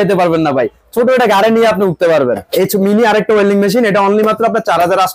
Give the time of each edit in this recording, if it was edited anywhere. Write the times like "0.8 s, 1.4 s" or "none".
2.5 s